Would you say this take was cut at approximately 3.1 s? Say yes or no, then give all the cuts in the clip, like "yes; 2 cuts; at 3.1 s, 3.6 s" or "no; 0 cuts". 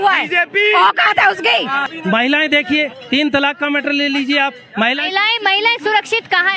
no; 1 cut; at 1.9 s